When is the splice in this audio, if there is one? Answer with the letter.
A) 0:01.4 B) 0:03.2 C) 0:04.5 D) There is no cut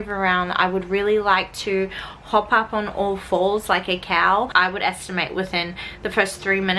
C